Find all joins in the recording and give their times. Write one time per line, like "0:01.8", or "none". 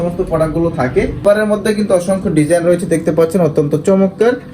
0:01.2